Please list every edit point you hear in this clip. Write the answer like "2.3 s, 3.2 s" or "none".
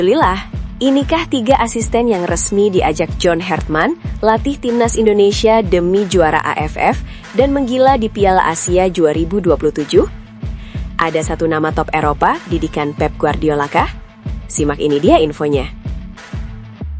16.1 s